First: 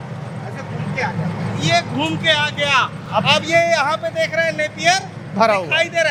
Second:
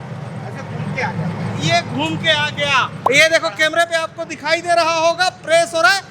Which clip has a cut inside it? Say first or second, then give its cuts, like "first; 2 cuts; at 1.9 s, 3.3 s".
second; 1 cut; at 2.9 s